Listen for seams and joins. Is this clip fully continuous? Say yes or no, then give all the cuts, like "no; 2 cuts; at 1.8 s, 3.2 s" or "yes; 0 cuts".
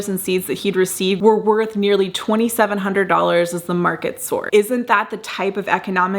no; 2 cuts; at 1.2 s, 4.4 s